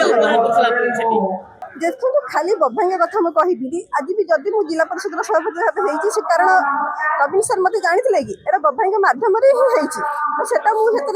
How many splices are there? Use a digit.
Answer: 1